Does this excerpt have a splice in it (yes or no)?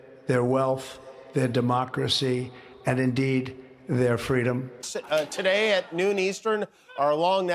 yes